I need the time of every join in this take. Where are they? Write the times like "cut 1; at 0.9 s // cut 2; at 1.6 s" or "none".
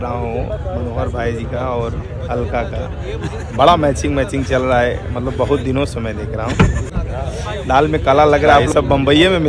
cut 1; at 7.0 s // cut 2; at 8.7 s